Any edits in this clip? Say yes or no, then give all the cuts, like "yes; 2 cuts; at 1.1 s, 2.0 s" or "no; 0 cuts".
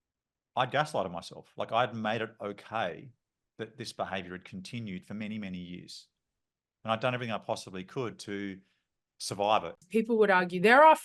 yes; 1 cut; at 9.8 s